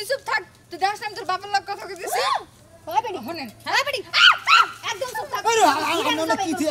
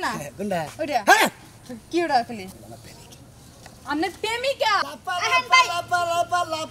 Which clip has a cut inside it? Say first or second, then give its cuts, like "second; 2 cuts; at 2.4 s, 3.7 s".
second; 1 cut; at 4.8 s